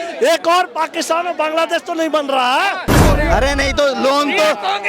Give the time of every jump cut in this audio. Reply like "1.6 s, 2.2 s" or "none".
2.9 s